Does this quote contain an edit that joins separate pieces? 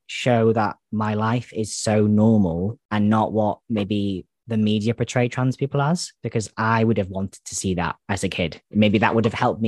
no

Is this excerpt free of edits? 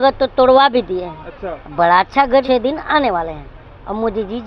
no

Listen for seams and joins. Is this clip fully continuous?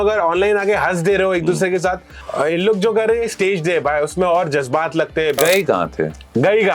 no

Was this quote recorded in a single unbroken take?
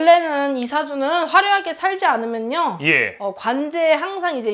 yes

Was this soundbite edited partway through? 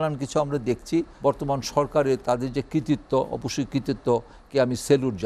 yes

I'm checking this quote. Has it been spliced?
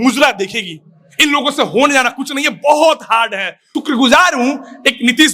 yes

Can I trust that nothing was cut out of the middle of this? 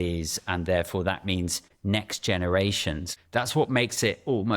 no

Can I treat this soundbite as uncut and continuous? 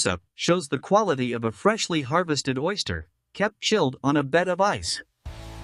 yes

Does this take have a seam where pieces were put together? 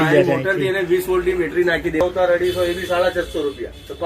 yes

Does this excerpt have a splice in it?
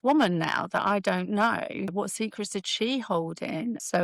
no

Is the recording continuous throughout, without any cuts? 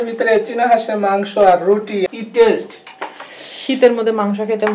no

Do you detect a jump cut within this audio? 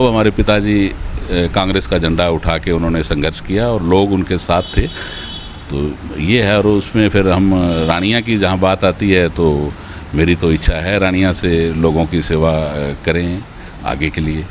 no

